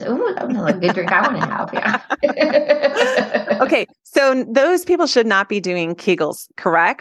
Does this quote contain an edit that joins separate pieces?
no; 0 cuts

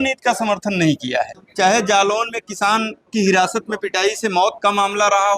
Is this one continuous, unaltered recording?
no; 1 cut; at 1.4 s

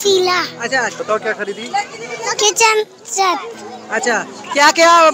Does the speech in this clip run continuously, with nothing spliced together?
no; 1 cut; at 0.9 s

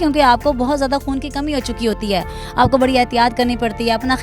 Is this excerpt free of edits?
yes; 0 cuts

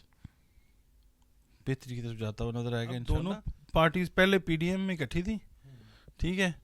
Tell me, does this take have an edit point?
yes; 1 cut; at 3.1 s

